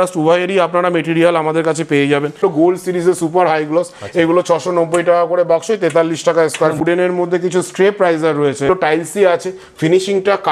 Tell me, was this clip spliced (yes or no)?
yes